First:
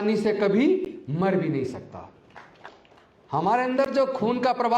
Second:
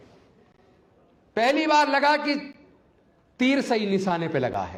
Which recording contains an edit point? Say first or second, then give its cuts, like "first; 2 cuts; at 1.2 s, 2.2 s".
first; 1 cut; at 2.7 s